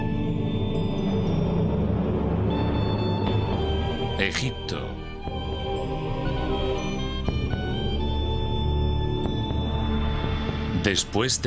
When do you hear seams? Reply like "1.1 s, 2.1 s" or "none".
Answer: 4.3 s